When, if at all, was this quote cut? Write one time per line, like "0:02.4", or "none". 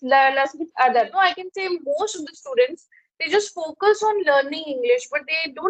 0:00.9